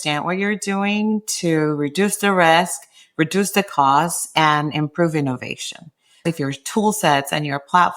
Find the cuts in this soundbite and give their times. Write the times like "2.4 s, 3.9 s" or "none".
6.2 s